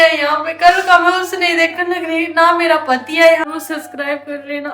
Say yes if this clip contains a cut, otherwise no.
yes